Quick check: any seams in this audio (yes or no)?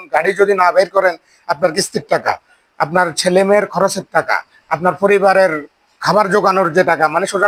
no